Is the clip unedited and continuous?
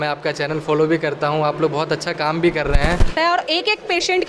no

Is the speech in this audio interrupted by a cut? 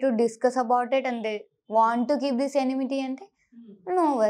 no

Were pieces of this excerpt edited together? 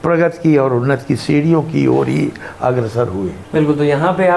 no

